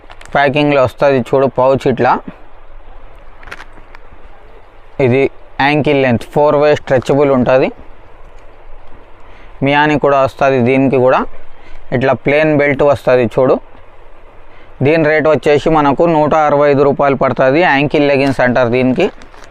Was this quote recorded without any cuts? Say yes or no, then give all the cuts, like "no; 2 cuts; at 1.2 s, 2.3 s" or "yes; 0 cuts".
yes; 0 cuts